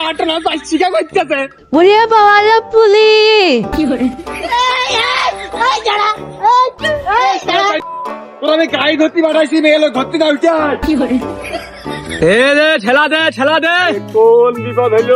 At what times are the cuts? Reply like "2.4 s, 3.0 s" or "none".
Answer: 12.0 s